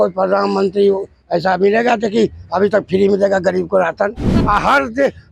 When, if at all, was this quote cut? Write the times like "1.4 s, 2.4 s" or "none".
4.3 s